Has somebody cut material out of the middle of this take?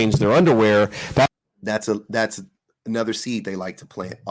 no; 0 cuts

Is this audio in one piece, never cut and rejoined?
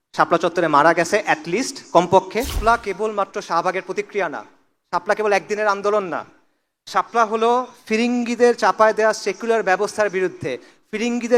no; 1 cut; at 2.6 s

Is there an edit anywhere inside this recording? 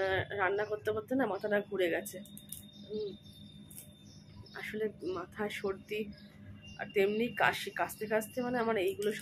no; 0 cuts

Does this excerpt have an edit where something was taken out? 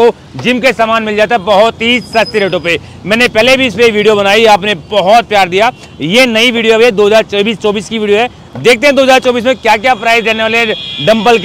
no; 0 cuts

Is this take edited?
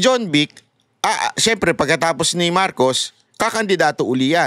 no; 0 cuts

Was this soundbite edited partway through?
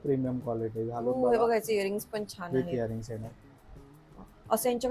no; 0 cuts

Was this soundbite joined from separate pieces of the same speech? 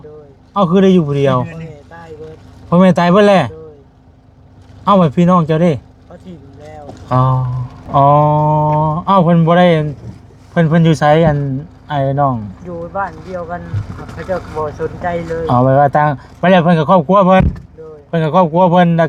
no; 0 cuts

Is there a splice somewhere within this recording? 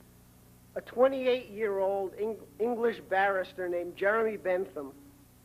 yes; 1 cut; at 3.4 s

